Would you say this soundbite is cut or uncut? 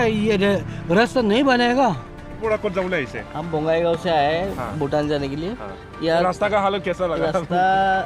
cut